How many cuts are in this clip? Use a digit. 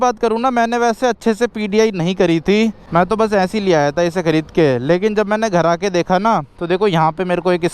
1